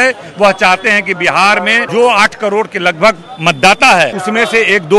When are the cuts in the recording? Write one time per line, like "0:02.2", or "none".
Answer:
0:01.8
0:04.2